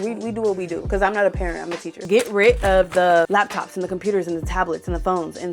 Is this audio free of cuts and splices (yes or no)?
no